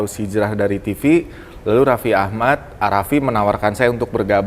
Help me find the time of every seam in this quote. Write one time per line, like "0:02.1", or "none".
none